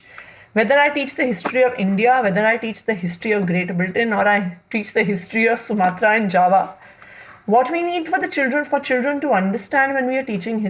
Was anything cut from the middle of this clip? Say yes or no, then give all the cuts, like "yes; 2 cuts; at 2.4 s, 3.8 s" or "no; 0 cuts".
no; 0 cuts